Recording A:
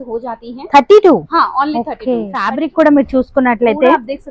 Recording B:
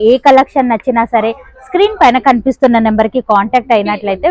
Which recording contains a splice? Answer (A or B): A